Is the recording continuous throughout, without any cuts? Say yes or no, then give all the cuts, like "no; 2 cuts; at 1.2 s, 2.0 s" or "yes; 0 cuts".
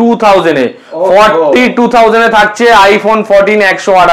yes; 0 cuts